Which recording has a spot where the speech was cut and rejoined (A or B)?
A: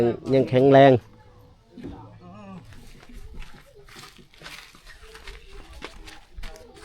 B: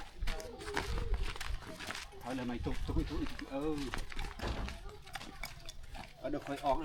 A